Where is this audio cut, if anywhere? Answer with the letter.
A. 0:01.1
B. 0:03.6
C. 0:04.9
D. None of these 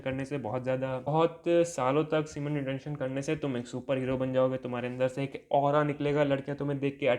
A